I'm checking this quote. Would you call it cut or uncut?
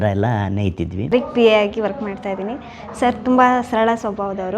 cut